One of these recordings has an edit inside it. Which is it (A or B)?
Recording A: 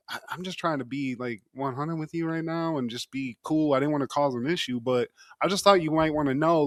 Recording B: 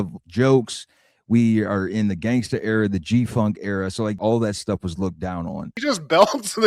B